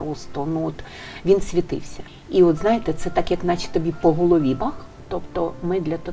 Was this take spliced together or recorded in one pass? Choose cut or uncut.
cut